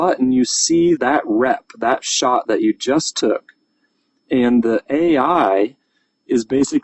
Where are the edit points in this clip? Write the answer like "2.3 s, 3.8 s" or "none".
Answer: 1.0 s